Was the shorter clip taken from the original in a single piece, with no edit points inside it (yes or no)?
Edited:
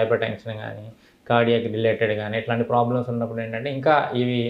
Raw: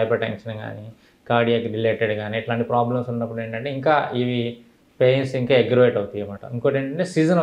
yes